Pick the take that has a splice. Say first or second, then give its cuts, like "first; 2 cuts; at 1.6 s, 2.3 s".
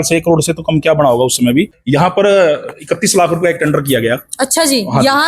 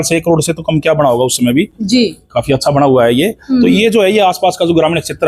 first; 1 cut; at 1.8 s